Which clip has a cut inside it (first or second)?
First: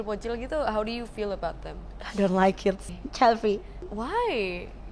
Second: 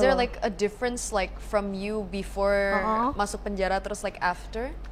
first